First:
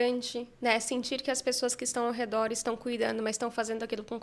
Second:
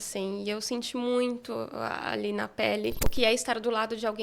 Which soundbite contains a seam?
second; 1 cut; at 3.0 s

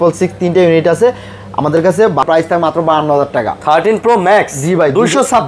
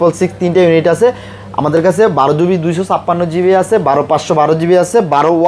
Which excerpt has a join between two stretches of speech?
first; 1 cut; at 2.2 s

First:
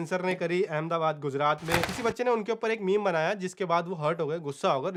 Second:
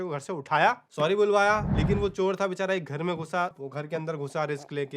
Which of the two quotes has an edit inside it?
second; 2 cuts; at 1.7 s, 3.6 s

